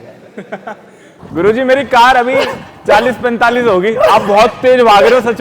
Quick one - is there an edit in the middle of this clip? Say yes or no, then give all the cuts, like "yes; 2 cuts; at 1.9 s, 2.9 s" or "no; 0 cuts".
yes; 1 cut; at 1.2 s